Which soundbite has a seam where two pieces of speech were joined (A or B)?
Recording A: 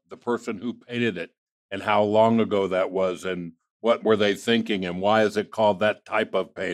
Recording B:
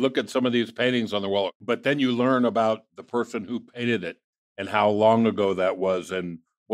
B